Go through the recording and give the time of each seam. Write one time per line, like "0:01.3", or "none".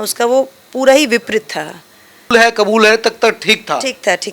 0:02.3